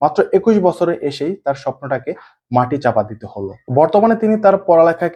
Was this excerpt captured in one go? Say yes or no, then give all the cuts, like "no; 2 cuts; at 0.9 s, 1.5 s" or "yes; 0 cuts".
yes; 0 cuts